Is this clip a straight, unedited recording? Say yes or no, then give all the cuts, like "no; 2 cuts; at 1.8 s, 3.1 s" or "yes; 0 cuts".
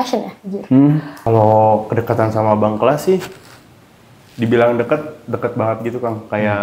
no; 1 cut; at 1.1 s